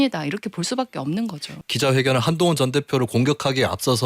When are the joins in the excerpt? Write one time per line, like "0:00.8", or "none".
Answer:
0:01.5